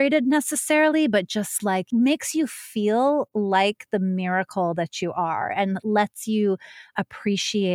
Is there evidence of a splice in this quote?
yes; 1 cut; at 1.8 s

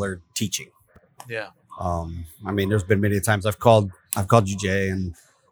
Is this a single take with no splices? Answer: yes; 0 cuts

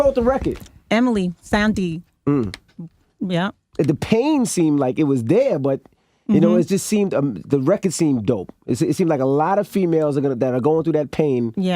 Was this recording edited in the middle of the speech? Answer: yes; 1 cut; at 4.9 s

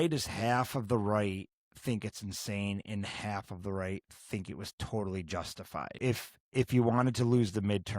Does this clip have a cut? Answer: yes; 1 cut; at 6.0 s

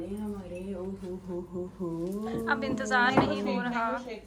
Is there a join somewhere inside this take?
no; 0 cuts

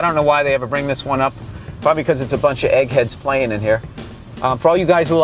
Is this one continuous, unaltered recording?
yes; 0 cuts

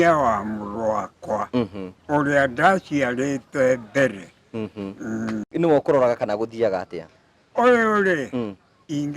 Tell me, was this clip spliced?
no; 0 cuts

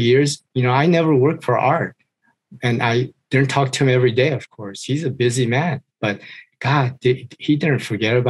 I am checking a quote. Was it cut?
no; 0 cuts

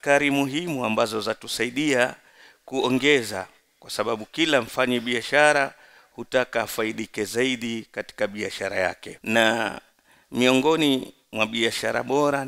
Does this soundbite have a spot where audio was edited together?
yes; 1 cut; at 9.1 s

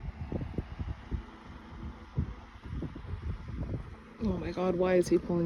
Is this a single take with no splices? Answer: yes; 0 cuts

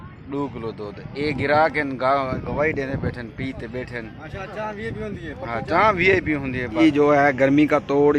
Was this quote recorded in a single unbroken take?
no; 1 cut; at 6.8 s

